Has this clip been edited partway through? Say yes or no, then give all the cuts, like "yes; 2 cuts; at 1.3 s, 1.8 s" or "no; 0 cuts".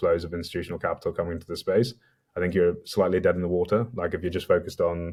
no; 0 cuts